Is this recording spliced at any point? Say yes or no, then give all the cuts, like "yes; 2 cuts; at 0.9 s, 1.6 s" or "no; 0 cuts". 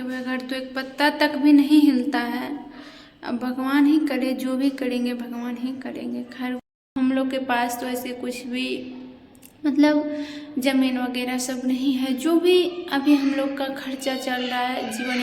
yes; 1 cut; at 6.7 s